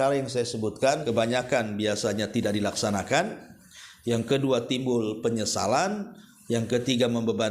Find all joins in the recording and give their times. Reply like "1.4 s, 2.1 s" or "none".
1.0 s